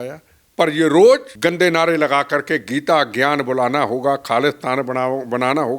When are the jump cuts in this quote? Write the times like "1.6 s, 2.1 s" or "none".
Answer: 1.3 s